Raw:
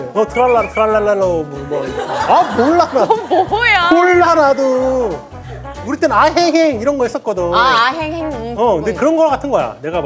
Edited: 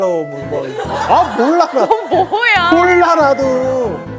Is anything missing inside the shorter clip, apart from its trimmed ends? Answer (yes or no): no